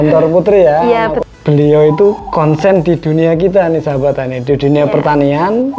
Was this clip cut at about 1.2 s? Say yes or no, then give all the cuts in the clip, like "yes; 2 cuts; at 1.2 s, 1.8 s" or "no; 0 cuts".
yes; 1 cut; at 1.2 s